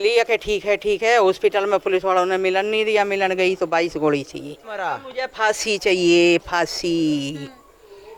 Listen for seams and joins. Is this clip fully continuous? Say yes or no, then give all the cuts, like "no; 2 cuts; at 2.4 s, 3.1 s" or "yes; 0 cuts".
no; 1 cut; at 4.8 s